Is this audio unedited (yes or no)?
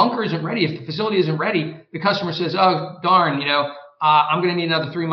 yes